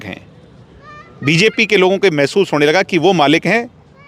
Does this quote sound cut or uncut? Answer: uncut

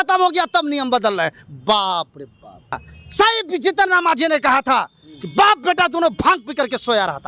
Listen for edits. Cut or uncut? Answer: cut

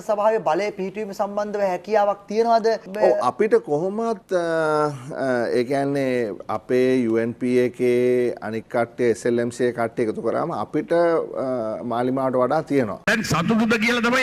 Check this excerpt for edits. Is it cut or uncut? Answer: uncut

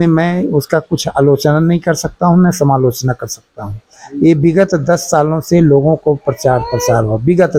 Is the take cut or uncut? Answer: uncut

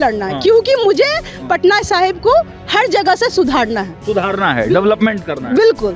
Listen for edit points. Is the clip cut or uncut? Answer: uncut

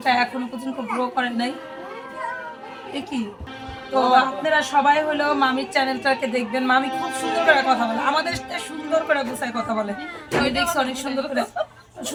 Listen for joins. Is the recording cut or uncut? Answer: uncut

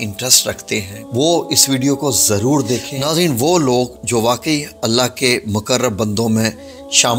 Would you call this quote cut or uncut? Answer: cut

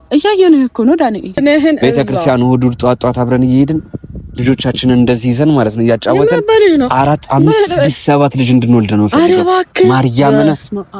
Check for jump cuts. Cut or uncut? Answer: cut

